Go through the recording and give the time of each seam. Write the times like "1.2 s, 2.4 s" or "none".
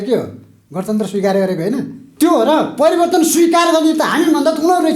2.0 s